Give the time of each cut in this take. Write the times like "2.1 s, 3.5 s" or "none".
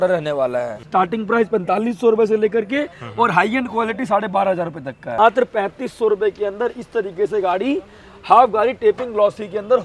0.9 s, 5.2 s